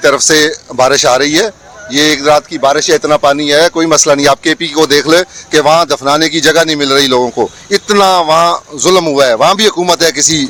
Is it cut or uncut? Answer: uncut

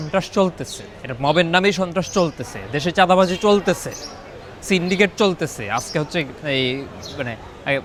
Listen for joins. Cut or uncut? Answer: uncut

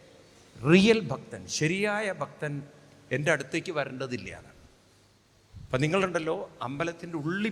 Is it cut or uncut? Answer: uncut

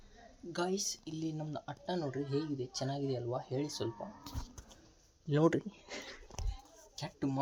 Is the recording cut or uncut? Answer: uncut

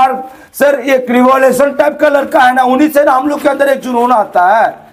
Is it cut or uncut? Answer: uncut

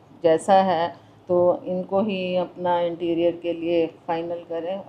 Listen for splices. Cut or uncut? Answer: uncut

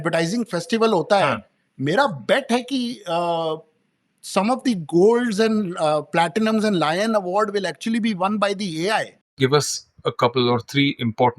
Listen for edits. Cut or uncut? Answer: cut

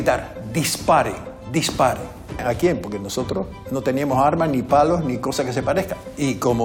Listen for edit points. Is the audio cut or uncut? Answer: cut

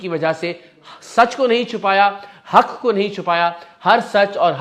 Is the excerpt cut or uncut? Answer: uncut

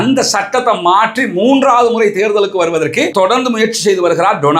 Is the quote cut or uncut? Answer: cut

